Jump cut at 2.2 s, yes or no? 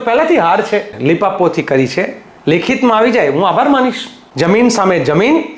no